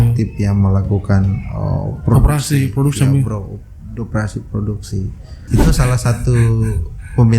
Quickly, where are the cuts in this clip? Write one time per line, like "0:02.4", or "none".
0:05.5